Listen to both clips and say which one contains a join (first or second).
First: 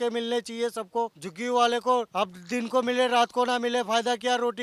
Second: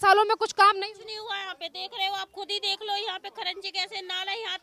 first